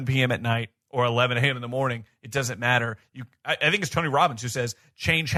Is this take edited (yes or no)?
no